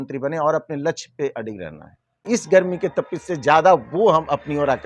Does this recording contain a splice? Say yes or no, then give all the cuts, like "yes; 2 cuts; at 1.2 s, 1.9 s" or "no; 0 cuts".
yes; 1 cut; at 2.4 s